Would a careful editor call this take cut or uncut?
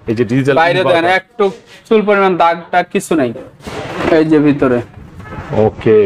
cut